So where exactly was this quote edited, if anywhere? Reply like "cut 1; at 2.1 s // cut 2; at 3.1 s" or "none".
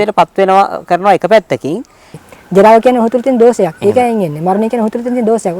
cut 1; at 2.2 s